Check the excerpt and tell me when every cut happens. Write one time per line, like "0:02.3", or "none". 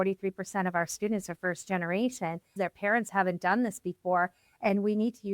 0:02.5